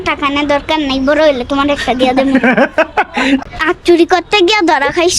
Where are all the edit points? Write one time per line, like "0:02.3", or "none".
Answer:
0:03.4